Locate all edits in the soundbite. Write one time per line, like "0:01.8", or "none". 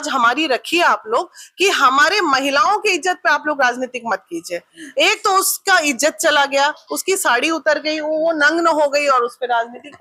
none